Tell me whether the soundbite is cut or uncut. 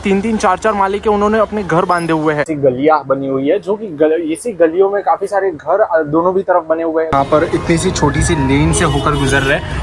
cut